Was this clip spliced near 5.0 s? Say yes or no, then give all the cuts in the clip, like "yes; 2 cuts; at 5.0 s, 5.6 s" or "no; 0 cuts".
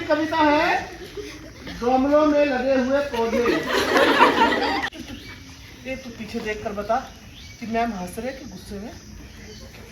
yes; 1 cut; at 5.0 s